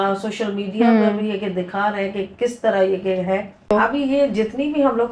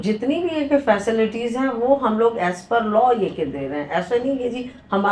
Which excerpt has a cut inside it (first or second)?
first